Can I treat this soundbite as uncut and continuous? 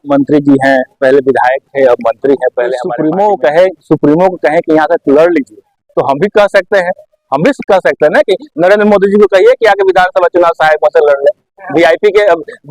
no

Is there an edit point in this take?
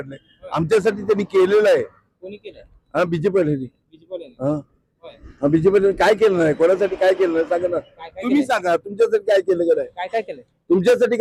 no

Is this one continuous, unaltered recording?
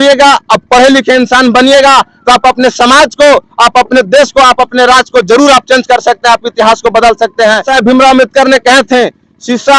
no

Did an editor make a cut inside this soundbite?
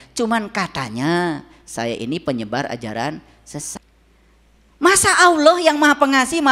yes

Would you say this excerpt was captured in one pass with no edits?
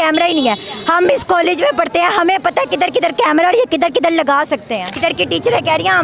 no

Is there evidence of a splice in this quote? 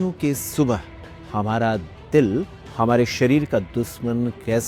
no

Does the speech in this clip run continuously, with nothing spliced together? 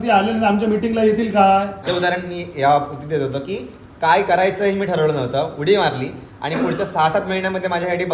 no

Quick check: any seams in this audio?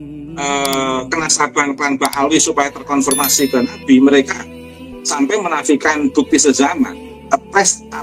yes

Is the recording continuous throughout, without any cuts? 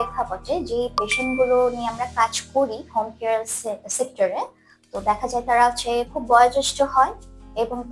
yes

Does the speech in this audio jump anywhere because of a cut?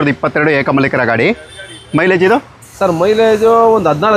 no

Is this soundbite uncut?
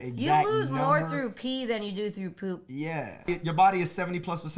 no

